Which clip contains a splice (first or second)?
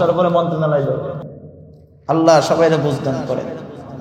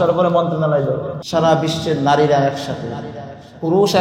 second